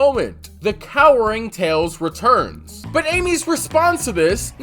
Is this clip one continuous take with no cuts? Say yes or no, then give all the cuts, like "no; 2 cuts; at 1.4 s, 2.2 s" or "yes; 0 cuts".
no; 1 cut; at 2.8 s